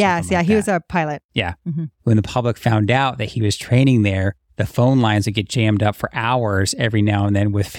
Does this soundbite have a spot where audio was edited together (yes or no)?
yes